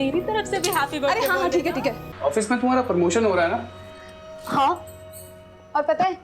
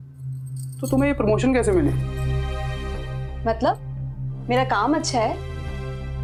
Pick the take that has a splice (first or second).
first